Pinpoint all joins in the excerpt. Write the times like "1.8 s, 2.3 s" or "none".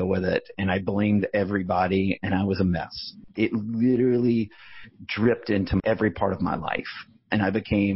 3.2 s, 5.8 s